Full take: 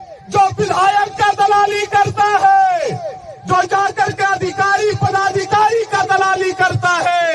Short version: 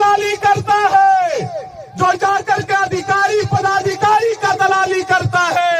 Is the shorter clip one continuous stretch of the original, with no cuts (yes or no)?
yes